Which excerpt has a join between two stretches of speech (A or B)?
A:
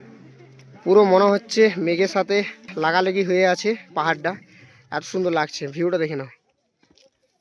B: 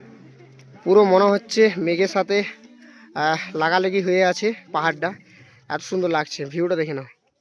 A